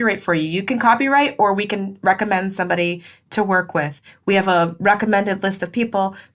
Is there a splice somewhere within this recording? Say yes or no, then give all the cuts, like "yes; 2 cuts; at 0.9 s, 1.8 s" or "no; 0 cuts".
no; 0 cuts